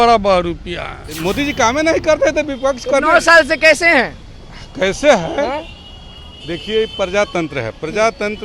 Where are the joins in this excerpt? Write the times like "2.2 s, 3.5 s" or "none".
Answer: 1.0 s